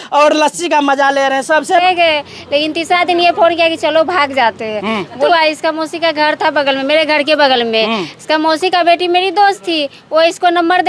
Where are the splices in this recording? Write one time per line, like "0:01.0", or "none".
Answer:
0:01.8
0:05.3